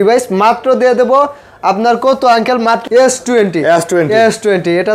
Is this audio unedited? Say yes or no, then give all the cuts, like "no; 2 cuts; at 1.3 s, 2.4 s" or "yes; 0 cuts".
no; 1 cut; at 2.8 s